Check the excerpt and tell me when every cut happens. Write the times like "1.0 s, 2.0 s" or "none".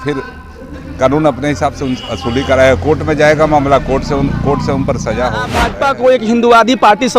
5.6 s